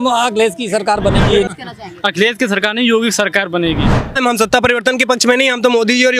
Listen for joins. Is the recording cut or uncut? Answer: cut